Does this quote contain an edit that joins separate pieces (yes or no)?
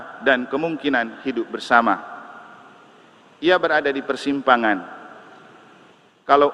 no